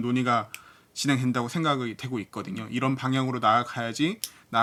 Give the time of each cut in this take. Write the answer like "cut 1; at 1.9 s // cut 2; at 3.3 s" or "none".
none